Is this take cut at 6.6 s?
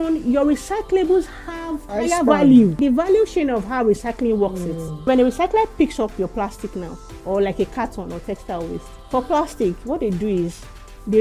no; 4 cuts; at 1.9 s, 2.8 s, 5.1 s, 8.9 s

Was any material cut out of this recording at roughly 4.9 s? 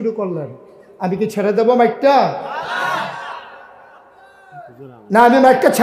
no; 0 cuts

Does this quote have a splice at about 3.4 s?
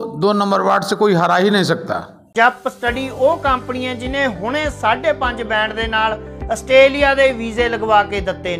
no; 1 cut; at 2.2 s

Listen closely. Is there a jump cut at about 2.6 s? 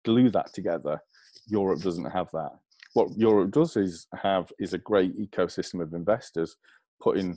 yes; 1 cut; at 2.6 s

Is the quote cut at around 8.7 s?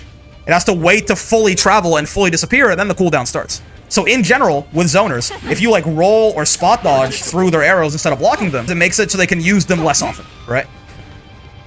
yes; 1 cut; at 8.7 s

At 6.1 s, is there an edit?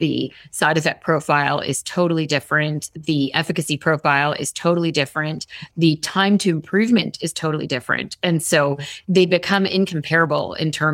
no; 0 cuts

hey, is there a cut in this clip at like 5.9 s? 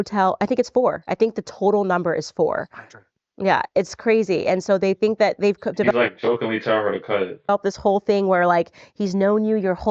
no; 0 cuts

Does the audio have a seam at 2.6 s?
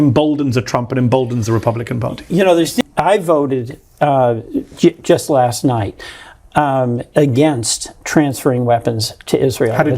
yes; 1 cut; at 2.6 s

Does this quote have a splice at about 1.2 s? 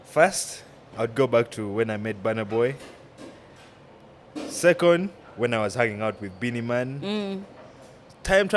no; 0 cuts

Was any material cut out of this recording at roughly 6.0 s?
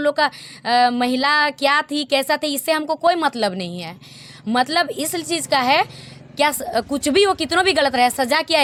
no; 0 cuts

